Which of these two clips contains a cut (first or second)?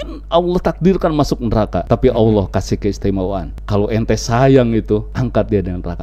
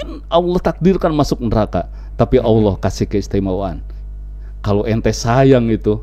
first